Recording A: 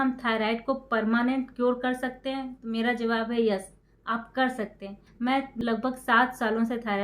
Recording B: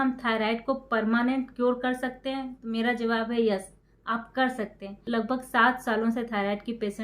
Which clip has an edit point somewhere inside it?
B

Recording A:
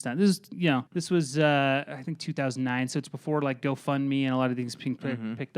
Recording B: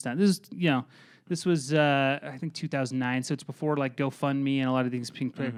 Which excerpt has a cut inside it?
A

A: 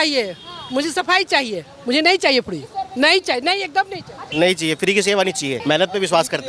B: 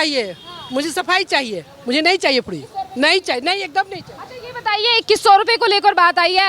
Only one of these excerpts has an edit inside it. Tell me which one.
A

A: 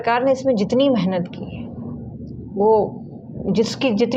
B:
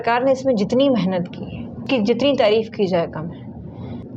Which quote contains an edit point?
B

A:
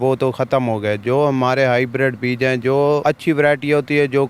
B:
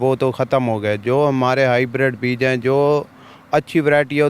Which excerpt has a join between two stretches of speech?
A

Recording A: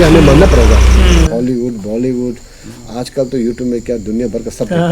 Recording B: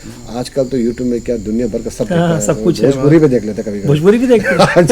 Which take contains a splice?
A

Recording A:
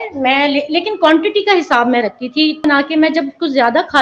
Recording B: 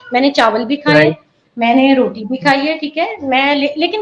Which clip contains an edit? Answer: A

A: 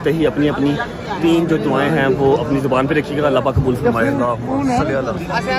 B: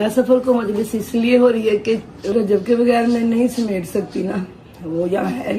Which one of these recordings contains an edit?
B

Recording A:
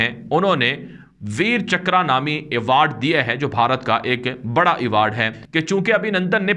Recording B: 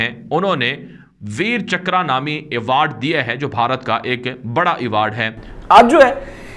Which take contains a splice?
B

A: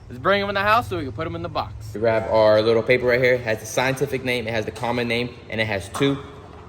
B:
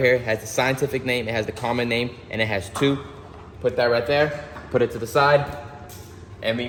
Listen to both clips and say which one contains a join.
A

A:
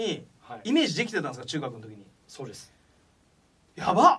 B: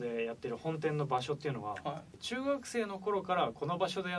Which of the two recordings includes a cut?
B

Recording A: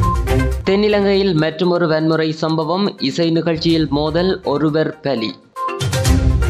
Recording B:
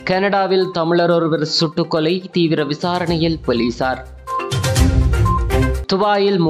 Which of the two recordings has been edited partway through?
A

